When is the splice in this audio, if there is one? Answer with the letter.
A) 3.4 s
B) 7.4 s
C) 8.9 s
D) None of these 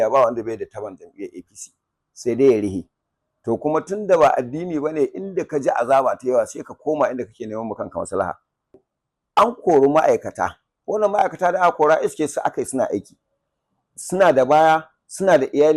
C